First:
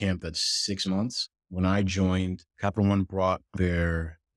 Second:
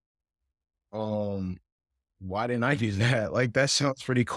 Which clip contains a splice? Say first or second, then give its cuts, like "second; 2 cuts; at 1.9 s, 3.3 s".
first; 2 cuts; at 1.4 s, 2.5 s